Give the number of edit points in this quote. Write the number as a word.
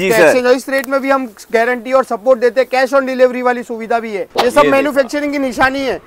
one